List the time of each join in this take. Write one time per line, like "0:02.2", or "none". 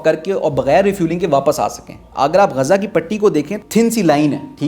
0:02.0
0:03.5